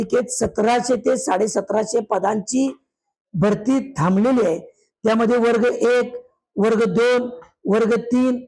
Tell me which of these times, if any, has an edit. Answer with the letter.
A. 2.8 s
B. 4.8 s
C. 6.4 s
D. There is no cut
D